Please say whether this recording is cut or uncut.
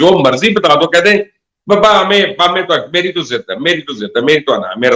uncut